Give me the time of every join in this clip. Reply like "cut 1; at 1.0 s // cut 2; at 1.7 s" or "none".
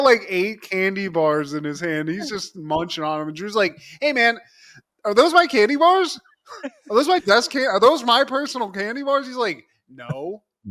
none